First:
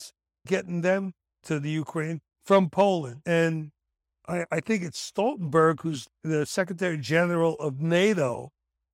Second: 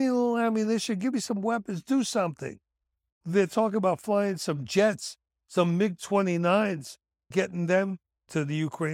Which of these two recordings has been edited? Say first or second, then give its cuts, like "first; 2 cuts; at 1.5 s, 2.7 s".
second; 1 cut; at 3.2 s